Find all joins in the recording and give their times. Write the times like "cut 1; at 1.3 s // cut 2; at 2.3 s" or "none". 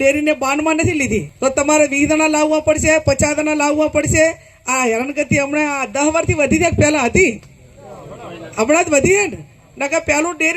cut 1; at 1.3 s